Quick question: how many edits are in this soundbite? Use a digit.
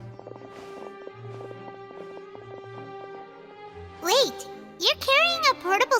1